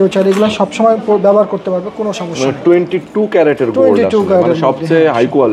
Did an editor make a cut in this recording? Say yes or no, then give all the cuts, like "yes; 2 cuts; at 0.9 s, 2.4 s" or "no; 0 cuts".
no; 0 cuts